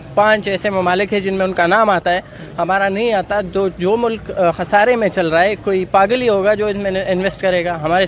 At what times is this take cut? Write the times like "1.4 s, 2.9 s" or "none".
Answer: none